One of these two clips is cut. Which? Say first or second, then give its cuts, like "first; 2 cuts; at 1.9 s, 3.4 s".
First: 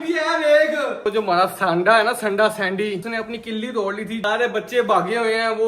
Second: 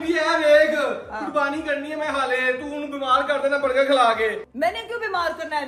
first; 3 cuts; at 1.0 s, 3.0 s, 4.2 s